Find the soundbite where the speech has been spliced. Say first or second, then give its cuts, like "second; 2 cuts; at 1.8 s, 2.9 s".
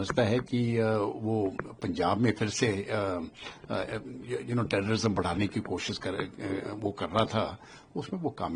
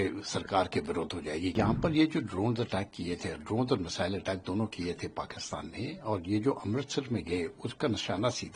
second; 1 cut; at 1.5 s